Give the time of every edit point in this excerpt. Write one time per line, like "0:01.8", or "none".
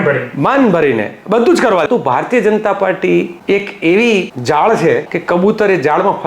0:01.8
0:03.3
0:04.3
0:05.1